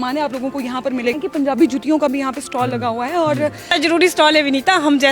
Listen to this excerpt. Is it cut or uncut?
cut